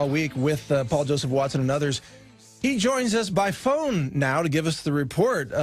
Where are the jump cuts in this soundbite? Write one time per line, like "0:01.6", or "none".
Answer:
none